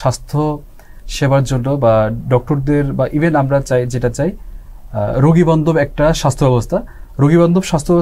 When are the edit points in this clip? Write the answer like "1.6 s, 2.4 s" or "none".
none

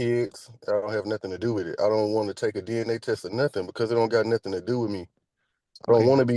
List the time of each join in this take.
none

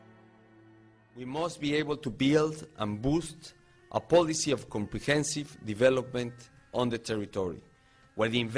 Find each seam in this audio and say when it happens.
1.1 s

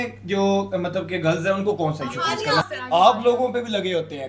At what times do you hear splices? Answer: 2.6 s

